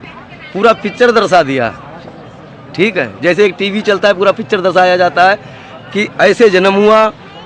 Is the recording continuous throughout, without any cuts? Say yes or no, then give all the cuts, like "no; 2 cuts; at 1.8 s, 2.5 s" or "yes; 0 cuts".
yes; 0 cuts